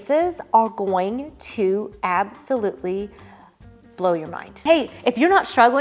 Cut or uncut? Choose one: cut